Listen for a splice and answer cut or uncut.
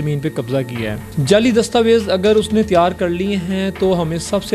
cut